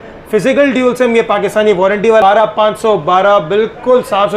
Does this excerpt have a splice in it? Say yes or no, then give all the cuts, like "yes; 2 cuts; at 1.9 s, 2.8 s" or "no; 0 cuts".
yes; 1 cut; at 2.2 s